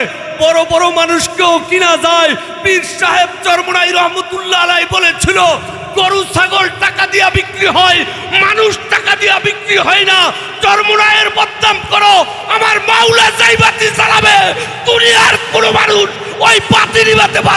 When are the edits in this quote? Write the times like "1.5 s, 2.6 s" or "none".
none